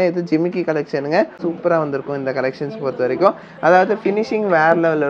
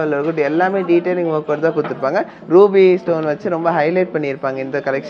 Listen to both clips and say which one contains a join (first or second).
first